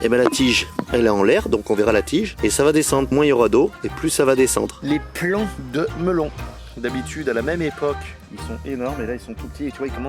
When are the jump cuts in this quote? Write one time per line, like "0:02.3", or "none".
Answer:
0:04.7